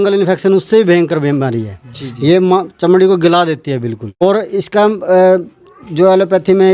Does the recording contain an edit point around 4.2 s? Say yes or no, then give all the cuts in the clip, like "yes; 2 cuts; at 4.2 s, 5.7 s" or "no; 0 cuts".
yes; 1 cut; at 4.2 s